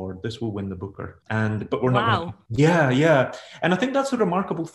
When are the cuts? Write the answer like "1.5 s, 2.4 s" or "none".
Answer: none